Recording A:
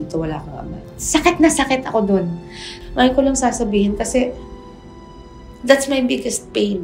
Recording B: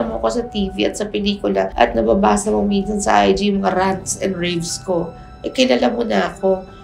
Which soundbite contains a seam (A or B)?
A